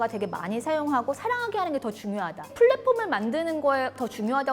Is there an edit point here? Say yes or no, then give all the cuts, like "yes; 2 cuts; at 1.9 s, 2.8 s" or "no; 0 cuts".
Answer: yes; 1 cut; at 2.4 s